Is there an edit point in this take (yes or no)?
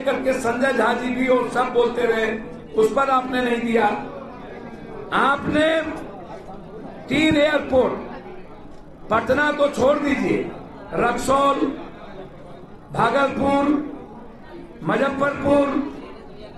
no